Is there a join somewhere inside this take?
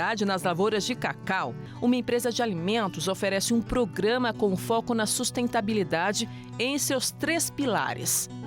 yes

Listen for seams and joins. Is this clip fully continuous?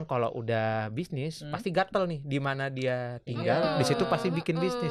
yes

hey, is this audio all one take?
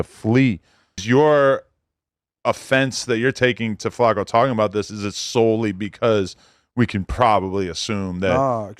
no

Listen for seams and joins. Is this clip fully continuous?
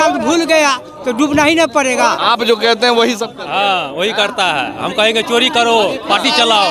no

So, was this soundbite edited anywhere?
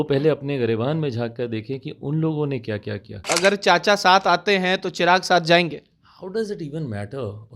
yes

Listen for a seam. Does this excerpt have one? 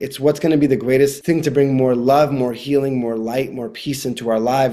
yes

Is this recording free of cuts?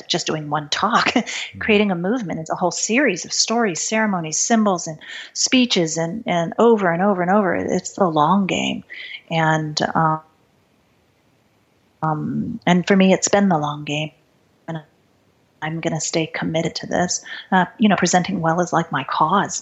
yes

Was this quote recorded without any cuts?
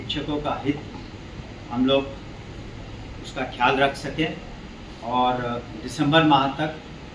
yes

